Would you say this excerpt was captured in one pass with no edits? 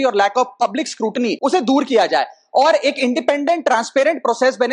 no; 1 cut; at 1.4 s

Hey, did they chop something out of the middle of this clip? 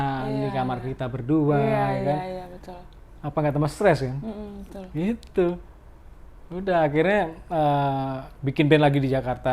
no; 0 cuts

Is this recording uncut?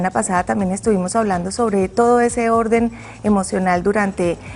yes; 0 cuts

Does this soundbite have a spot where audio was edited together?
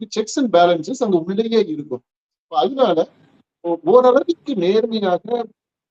no; 0 cuts

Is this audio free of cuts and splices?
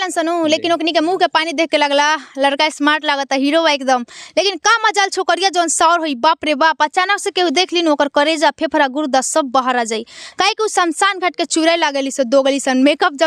yes; 0 cuts

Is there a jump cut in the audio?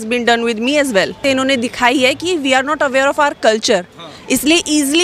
yes; 1 cut; at 1.2 s

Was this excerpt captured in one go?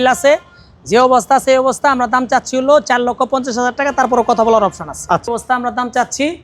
no; 1 cut; at 5.3 s

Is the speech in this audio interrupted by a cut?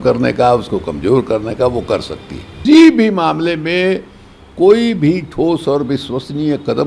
yes; 1 cut; at 2.5 s

